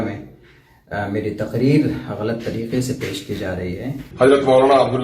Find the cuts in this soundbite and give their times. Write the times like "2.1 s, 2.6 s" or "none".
4.0 s